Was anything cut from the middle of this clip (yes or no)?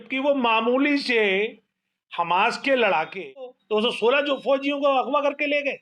yes